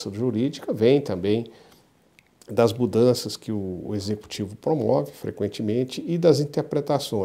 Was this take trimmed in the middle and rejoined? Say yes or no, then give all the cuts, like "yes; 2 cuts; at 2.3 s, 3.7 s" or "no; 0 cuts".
no; 0 cuts